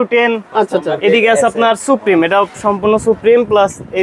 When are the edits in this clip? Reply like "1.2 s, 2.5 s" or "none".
none